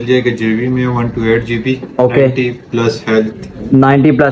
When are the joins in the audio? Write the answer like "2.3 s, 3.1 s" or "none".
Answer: none